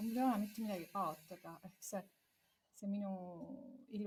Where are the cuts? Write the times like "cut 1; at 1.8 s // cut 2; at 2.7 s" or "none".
none

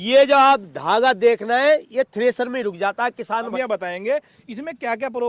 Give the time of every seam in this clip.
cut 1; at 3.5 s

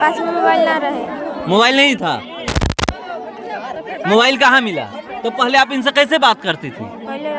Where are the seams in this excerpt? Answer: none

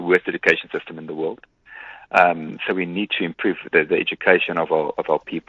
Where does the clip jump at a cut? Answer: none

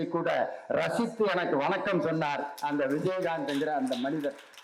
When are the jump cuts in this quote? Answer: none

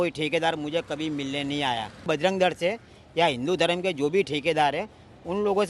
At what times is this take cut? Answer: cut 1; at 2.1 s

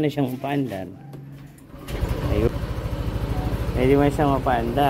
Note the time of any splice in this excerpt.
cut 1; at 2.5 s

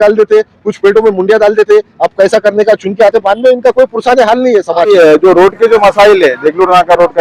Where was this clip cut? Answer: cut 1; at 4.9 s

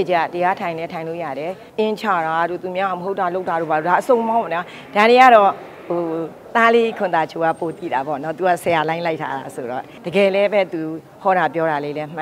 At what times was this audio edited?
cut 1; at 1.6 s // cut 2; at 9.9 s

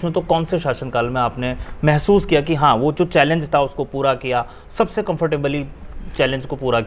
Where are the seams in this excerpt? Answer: none

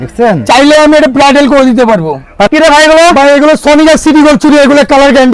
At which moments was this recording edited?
cut 1; at 2.5 s

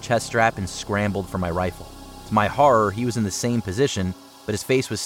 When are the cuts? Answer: none

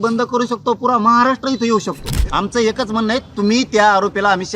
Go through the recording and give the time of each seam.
cut 1; at 2.1 s

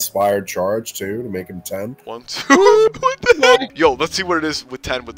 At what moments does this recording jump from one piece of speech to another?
none

